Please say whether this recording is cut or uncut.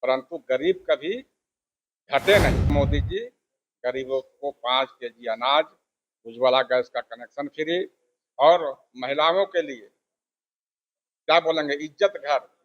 cut